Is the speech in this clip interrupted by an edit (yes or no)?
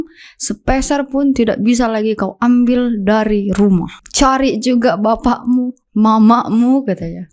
yes